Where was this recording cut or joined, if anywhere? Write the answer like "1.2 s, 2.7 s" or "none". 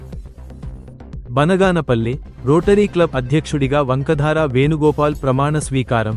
0.9 s